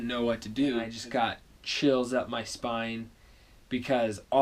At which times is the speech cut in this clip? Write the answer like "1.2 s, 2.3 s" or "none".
0.9 s